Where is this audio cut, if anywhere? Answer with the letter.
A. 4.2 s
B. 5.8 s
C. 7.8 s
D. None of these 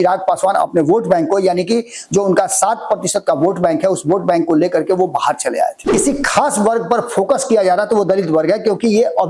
B